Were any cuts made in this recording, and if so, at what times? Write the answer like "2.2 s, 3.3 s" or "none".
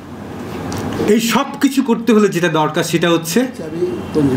none